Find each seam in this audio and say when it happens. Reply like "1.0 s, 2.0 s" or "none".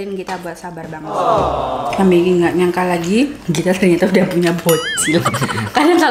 1.9 s